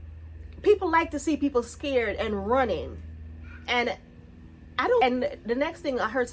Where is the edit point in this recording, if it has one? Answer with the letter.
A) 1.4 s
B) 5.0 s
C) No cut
B